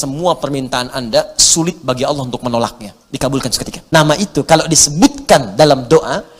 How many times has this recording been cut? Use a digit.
1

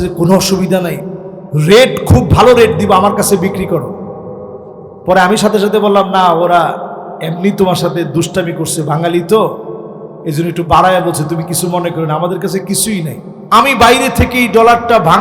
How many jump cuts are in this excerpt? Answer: 1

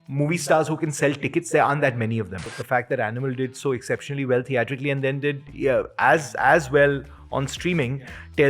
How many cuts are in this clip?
1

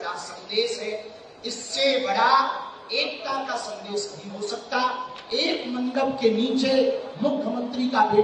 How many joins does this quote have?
0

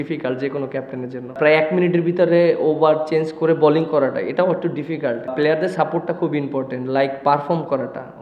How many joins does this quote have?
2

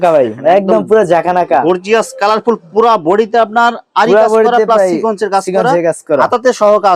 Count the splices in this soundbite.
0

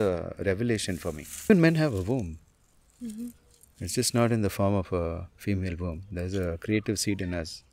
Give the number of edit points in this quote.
1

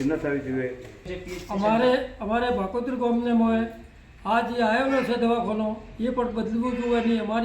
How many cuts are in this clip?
1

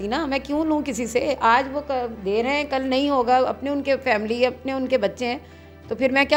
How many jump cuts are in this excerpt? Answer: 0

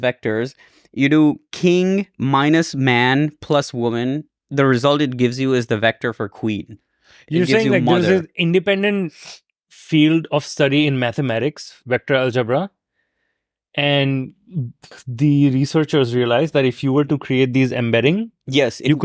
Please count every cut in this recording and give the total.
2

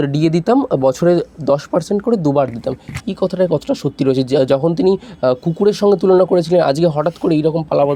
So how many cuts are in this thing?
0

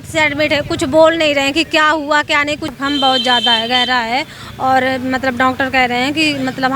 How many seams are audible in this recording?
1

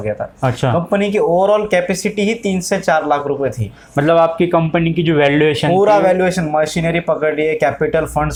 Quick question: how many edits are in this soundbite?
0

